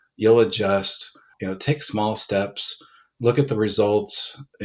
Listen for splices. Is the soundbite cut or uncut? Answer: cut